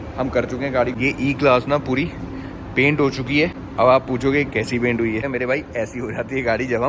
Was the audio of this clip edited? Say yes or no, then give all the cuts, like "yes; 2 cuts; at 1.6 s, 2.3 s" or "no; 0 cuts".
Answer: yes; 3 cuts; at 0.9 s, 3.6 s, 5.3 s